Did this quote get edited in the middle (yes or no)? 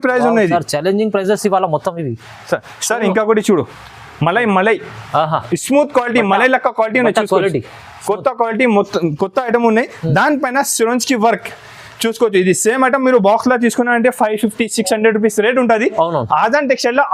no